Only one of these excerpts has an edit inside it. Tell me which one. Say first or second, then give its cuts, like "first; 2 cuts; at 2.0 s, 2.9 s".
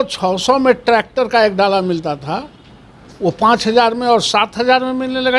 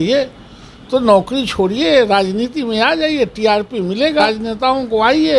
second; 1 cut; at 4.3 s